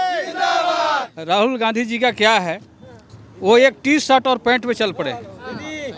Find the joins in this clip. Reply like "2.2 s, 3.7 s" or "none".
1.0 s